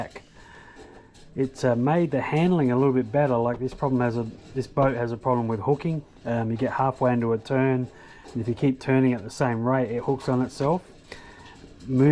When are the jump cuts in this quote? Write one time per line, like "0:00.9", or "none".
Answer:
none